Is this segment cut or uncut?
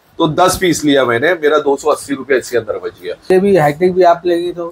cut